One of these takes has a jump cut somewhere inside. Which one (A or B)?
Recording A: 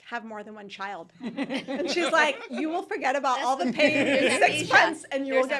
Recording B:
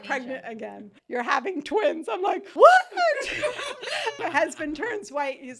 B